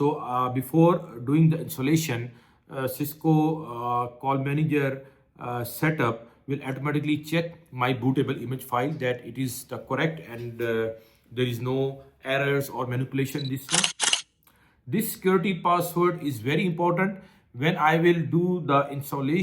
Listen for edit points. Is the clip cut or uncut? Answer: cut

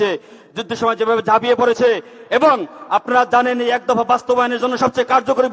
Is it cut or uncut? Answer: uncut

